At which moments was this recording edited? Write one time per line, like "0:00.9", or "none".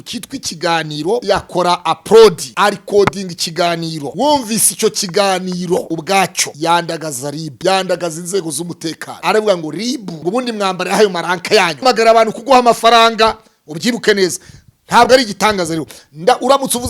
0:01.2
0:02.4
0:04.0
0:06.0
0:07.5
0:09.1
0:10.1
0:11.8